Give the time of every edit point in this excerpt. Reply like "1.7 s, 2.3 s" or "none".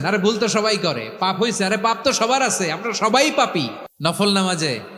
3.8 s